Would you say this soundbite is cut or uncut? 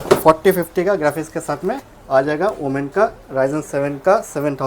uncut